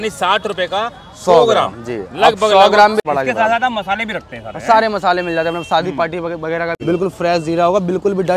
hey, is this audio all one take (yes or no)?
no